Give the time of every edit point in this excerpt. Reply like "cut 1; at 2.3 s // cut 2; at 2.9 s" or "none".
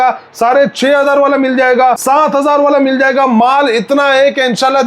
cut 1; at 2.0 s